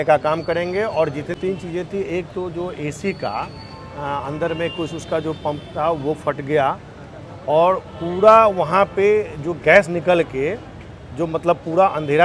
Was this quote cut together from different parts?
yes; 1 cut; at 1.3 s

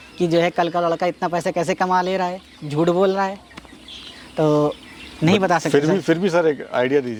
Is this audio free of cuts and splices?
yes; 0 cuts

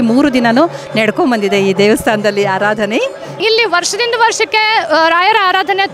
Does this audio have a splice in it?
yes; 1 cut; at 3.4 s

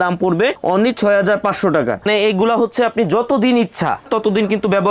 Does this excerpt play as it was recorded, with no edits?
no; 1 cut; at 2.0 s

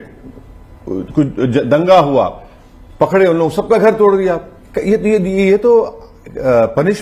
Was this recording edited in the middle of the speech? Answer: no; 0 cuts

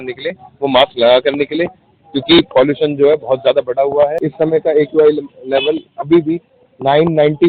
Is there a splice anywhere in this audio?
yes; 1 cut; at 4.2 s

